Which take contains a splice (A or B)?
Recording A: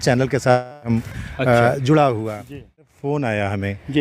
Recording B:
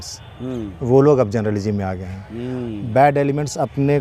A